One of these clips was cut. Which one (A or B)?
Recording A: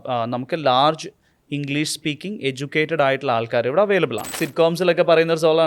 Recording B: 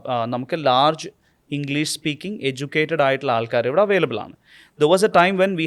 A